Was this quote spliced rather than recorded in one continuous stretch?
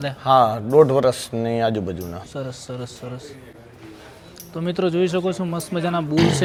no; 0 cuts

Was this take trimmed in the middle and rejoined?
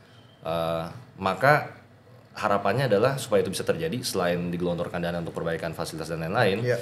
no; 0 cuts

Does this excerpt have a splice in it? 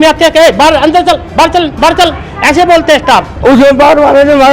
yes; 1 cut; at 3.3 s

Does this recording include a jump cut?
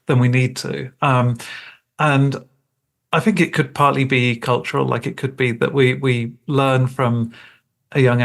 no; 0 cuts

